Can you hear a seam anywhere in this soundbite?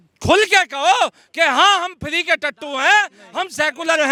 no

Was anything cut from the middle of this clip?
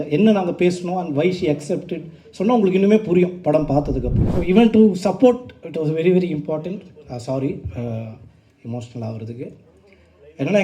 yes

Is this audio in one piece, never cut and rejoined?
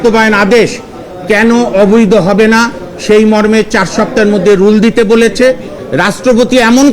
no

